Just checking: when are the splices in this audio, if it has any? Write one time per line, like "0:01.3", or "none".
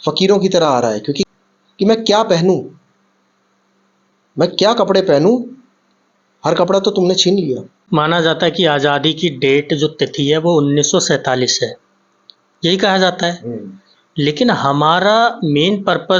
0:01.2
0:07.7